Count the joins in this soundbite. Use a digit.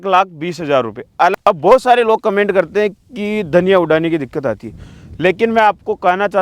1